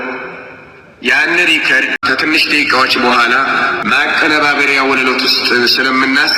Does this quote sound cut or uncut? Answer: cut